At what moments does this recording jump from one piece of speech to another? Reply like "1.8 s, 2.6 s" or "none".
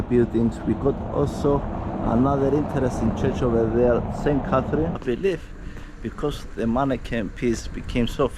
5.0 s

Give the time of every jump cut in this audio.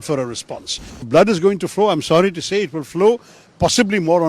1.0 s

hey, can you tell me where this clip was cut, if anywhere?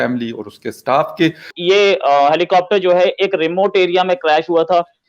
1.5 s

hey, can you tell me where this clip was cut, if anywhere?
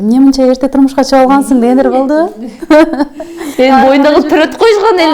none

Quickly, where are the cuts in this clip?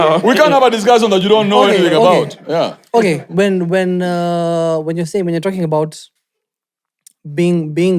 none

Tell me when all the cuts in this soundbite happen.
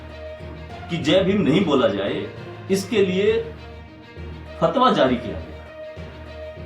0.9 s, 5.4 s

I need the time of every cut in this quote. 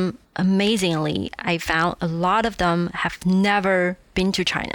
none

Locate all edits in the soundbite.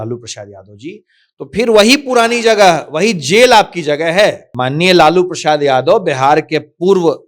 4.5 s

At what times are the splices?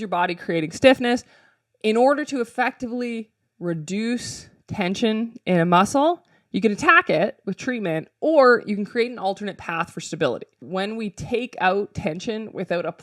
10.7 s

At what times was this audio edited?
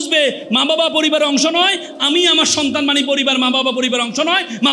none

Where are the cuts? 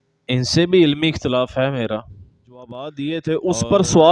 2.8 s

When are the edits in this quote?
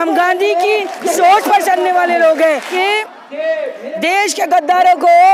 2.7 s

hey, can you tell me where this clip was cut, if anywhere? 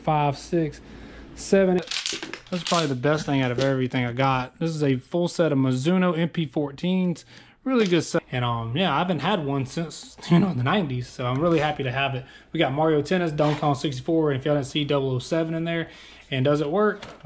1.8 s, 8.2 s

